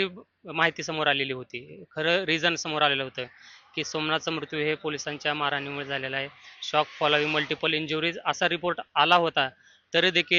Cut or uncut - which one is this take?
uncut